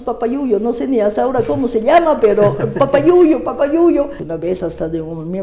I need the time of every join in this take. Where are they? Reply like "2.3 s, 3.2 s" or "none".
4.2 s

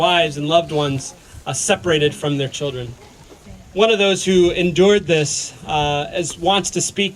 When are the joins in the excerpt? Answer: none

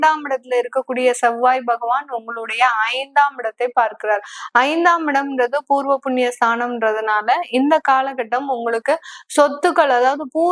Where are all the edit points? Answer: none

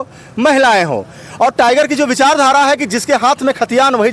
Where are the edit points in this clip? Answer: none

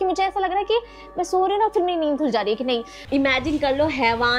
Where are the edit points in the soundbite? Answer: 3.0 s

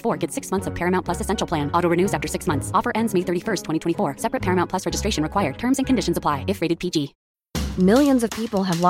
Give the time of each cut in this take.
7.2 s

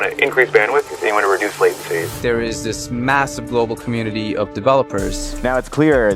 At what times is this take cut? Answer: 2.1 s, 5.3 s

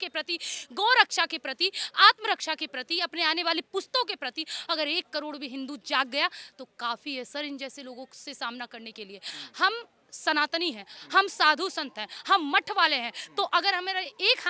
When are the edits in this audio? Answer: 9.3 s

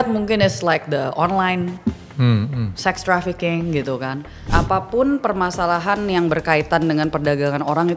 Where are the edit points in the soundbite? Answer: 4.5 s

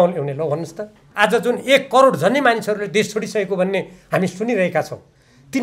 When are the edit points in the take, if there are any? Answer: 1.0 s

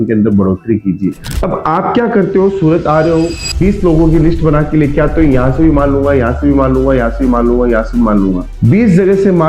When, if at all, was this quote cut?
1.3 s

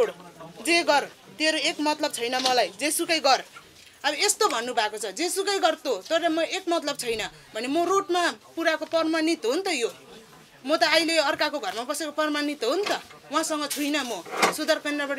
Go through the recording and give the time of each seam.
none

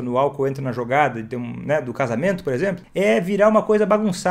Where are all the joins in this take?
2.8 s

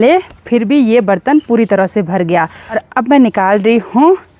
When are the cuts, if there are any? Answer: 2.7 s

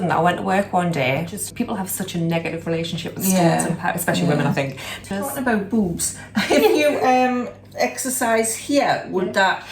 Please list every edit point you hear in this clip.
1.4 s, 5.3 s

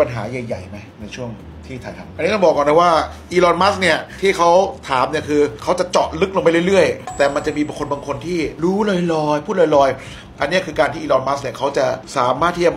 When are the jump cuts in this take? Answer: 2.1 s, 7.0 s

